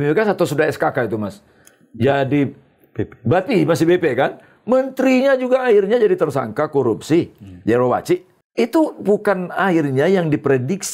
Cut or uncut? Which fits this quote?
uncut